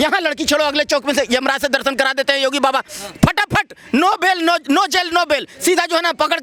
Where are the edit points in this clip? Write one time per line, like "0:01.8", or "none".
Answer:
none